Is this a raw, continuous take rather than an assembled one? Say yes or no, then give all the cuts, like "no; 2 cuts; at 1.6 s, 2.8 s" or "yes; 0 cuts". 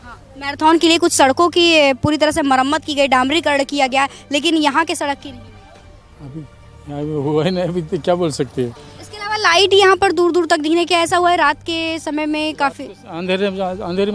yes; 0 cuts